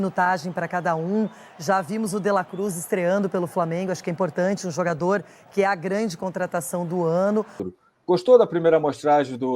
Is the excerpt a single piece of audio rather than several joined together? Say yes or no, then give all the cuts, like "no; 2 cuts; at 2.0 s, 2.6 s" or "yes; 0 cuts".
no; 1 cut; at 7.7 s